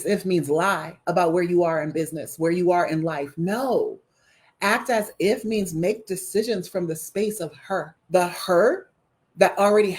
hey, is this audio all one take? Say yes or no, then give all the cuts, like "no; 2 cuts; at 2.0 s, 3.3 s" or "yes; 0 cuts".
no; 1 cut; at 8.0 s